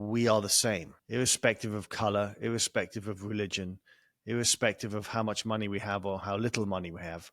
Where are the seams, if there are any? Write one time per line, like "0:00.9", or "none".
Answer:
0:00.9